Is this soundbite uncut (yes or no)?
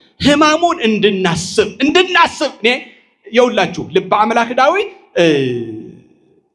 yes